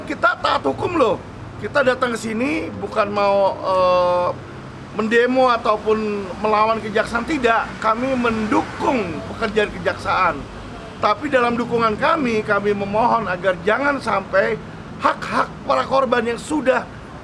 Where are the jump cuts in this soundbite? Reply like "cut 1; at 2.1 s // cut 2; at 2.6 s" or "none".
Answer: none